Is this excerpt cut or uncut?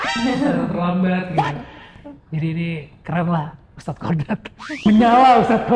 uncut